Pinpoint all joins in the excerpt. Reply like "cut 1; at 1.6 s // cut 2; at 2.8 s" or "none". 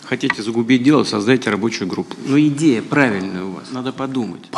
none